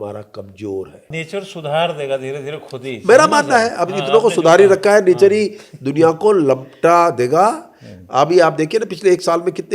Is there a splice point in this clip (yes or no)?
yes